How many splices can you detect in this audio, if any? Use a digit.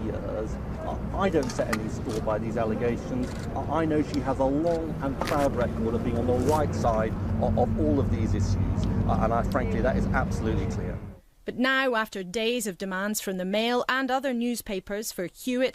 0